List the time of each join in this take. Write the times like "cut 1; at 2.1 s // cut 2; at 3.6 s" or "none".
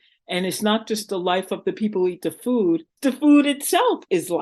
cut 1; at 2.9 s